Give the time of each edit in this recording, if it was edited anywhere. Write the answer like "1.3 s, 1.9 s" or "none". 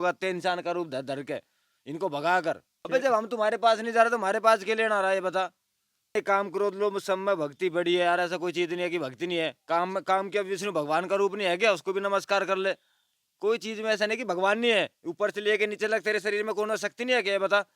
2.7 s, 6.1 s